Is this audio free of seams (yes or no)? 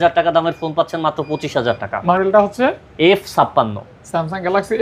no